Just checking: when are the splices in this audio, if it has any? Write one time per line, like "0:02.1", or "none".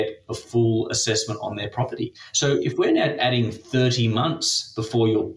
0:02.2